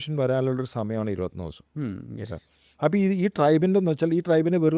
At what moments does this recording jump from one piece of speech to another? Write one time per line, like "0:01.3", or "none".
none